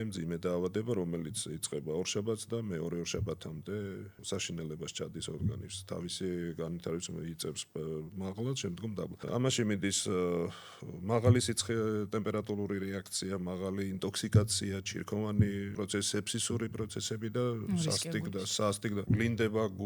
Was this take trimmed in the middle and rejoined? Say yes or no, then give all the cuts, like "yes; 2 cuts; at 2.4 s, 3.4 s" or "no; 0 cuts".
yes; 4 cuts; at 4.1 s, 9.2 s, 15.7 s, 19.0 s